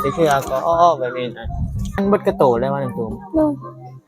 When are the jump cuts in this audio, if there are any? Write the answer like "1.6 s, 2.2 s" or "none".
2.0 s